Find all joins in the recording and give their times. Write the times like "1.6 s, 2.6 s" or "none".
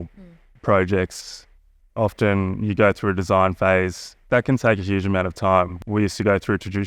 4.3 s, 5.8 s